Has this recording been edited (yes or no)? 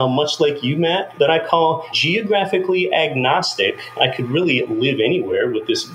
yes